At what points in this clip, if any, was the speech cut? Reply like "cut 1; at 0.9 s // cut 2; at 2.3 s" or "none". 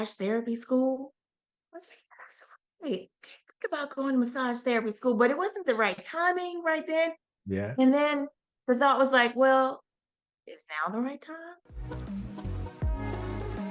cut 1; at 11.7 s